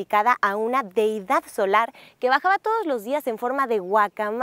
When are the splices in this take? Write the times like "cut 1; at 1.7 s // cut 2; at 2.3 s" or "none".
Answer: none